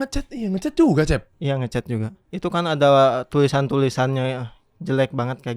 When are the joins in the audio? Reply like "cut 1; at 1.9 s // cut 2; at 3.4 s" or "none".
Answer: cut 1; at 1.3 s // cut 2; at 2.2 s